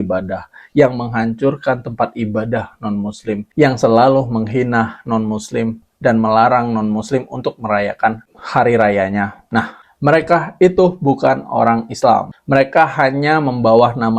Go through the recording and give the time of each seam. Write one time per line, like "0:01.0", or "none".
0:09.9